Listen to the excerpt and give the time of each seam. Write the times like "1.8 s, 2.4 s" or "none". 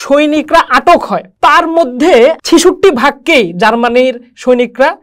1.2 s, 2.4 s